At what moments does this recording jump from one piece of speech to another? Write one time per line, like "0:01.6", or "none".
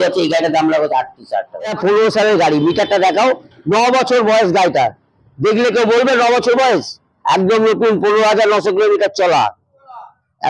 0:01.8